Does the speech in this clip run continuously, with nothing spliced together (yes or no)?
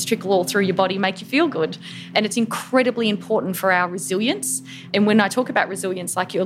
no